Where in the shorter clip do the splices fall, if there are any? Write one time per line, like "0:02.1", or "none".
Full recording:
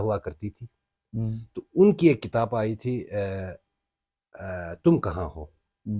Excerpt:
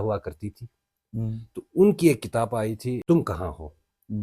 0:03.0